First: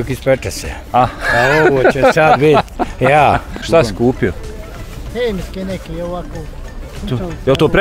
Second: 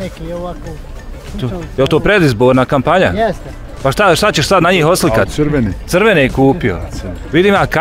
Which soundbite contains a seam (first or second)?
first